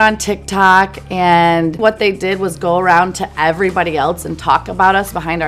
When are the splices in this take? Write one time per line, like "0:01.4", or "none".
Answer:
0:01.8